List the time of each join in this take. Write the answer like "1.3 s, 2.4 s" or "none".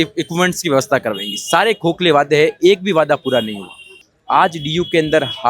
4.0 s